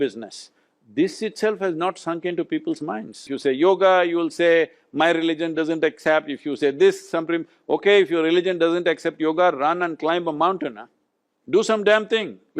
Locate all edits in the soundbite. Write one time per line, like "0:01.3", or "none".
0:03.3